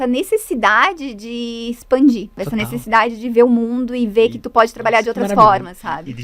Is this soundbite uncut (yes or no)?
no